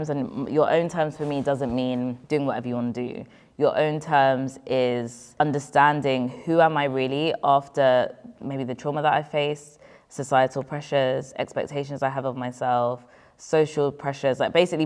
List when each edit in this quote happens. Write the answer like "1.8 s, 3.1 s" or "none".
2.2 s, 5.4 s